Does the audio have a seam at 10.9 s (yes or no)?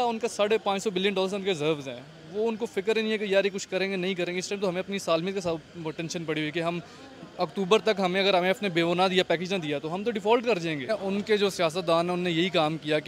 yes